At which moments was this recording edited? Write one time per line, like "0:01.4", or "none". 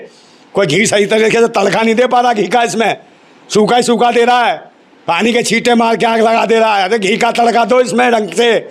none